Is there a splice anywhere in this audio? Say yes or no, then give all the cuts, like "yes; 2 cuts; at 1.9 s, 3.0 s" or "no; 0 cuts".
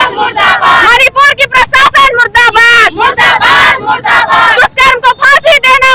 no; 0 cuts